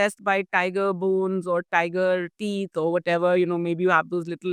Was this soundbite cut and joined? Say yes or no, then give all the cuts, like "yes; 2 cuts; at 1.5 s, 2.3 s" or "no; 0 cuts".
no; 0 cuts